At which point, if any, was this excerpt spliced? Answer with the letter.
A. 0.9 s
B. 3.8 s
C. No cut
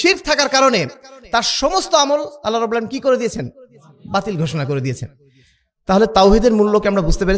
C